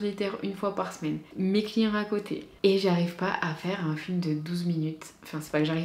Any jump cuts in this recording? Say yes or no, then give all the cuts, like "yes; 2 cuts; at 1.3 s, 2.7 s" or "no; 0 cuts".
yes; 1 cut; at 1.3 s